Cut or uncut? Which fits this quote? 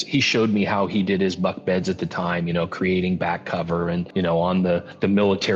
cut